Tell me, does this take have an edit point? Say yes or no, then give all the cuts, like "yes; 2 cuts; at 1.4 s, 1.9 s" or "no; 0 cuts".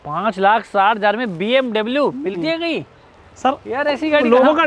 no; 0 cuts